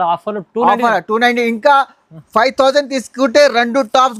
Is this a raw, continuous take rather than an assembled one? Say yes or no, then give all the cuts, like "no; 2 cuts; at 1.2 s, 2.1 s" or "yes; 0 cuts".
yes; 0 cuts